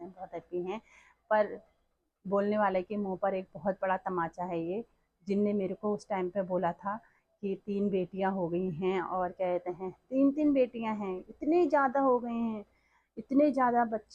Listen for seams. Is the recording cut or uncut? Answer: uncut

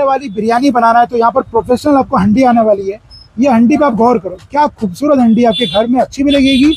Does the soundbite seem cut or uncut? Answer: uncut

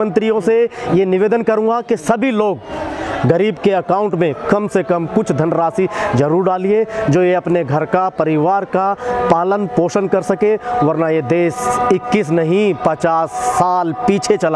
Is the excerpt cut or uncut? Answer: uncut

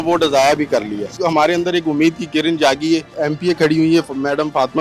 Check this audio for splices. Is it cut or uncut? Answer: cut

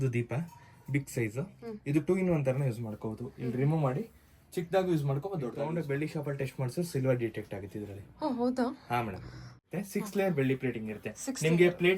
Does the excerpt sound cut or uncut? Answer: cut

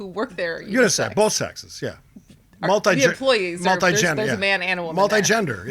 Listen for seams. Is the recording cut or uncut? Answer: uncut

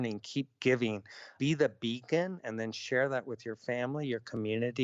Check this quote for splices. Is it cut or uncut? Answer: cut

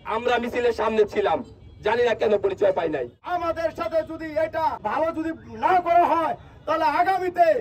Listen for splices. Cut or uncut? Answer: cut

